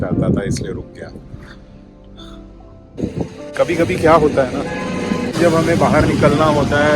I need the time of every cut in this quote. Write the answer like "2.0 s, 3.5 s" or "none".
2.8 s

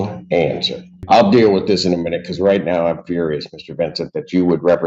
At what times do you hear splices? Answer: 1.0 s

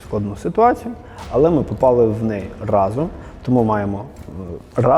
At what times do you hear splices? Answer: none

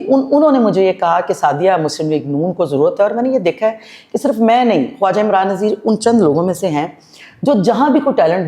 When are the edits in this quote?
none

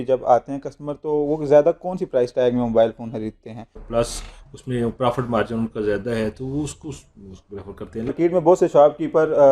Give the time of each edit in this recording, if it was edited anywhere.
3.8 s, 8.1 s

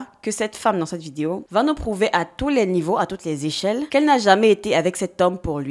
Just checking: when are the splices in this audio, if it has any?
1.4 s

